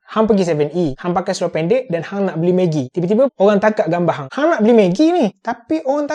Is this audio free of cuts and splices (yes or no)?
no